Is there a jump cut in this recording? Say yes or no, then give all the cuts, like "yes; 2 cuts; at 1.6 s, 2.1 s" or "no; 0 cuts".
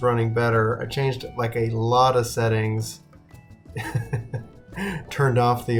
no; 0 cuts